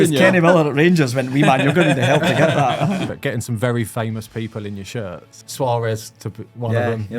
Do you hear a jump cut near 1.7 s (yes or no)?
no